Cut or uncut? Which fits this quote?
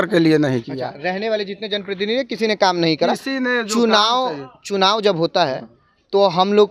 uncut